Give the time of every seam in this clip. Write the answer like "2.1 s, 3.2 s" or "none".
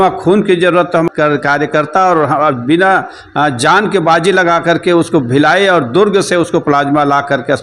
1.1 s